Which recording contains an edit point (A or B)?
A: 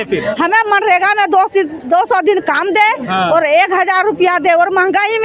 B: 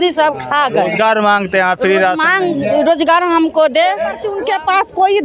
B